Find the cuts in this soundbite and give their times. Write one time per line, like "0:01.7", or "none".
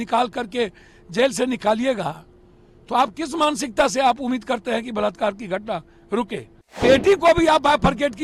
0:06.8